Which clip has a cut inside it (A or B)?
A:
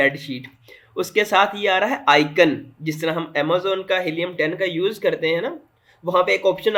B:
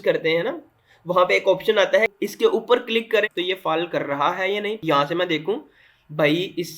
B